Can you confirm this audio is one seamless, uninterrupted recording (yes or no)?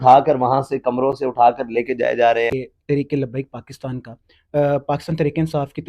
no